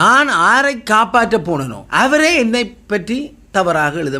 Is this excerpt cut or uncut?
cut